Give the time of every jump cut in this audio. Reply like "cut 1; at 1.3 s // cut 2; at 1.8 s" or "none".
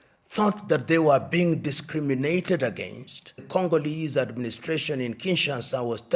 cut 1; at 3.4 s